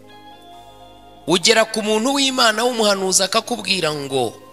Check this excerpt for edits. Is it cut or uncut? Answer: cut